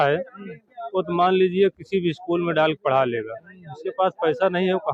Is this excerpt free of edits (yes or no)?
yes